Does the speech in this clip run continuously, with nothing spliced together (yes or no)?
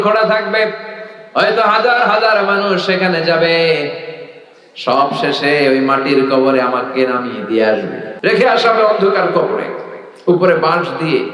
no